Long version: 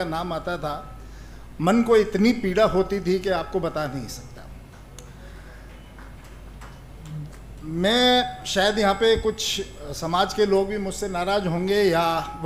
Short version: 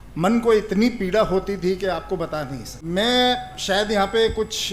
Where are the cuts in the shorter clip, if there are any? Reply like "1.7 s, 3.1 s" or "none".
2.7 s